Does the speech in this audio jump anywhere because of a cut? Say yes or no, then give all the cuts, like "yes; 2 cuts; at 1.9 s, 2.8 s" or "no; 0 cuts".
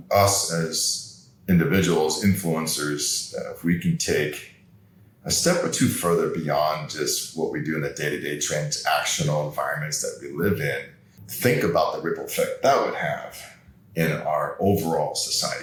no; 0 cuts